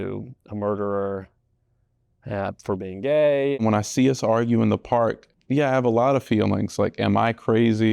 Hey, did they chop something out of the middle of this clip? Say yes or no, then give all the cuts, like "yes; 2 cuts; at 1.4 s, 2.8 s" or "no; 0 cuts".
yes; 2 cuts; at 3.6 s, 5.3 s